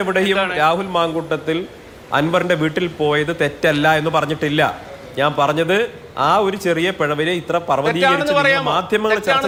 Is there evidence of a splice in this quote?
no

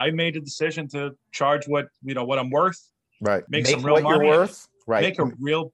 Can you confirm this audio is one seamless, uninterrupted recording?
no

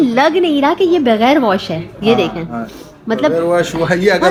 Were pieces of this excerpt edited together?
no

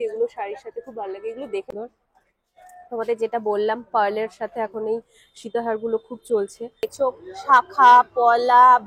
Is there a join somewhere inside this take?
yes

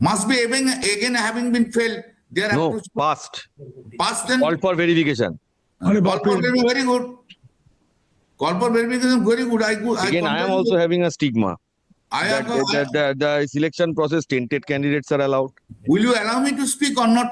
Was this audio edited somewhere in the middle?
no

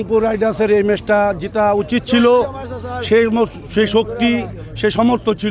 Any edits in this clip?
no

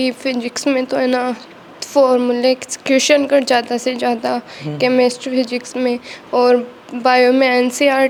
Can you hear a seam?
no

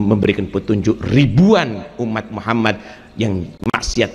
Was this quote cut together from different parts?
no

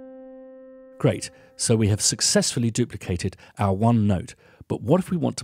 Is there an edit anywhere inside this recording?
yes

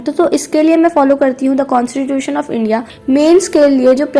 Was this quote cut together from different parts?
yes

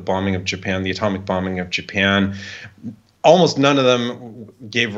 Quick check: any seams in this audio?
no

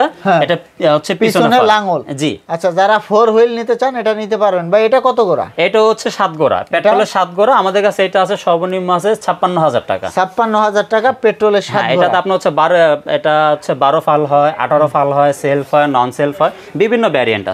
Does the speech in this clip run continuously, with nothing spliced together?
yes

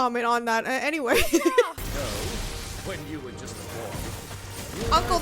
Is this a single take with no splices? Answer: no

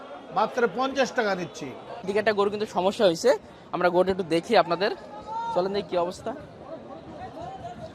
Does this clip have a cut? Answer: yes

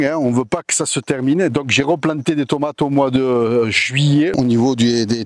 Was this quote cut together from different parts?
yes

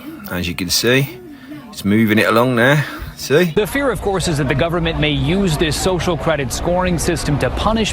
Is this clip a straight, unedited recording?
no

